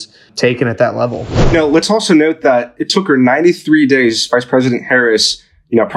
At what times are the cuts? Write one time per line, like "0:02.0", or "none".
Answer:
0:01.5